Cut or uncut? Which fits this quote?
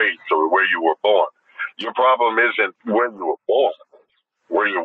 cut